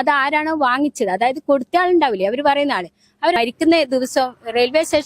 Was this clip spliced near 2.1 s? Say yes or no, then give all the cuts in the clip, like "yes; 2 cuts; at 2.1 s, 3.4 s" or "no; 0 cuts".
no; 1 cut; at 3.4 s